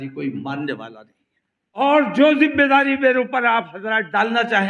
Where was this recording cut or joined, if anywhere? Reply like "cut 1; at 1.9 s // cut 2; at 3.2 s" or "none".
cut 1; at 1.8 s